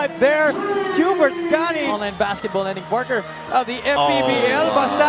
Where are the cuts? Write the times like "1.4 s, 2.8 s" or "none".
1.8 s